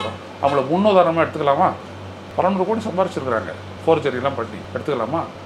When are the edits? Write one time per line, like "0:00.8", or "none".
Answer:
none